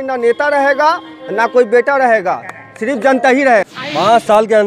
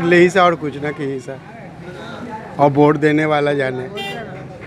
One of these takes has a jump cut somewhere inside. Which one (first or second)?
first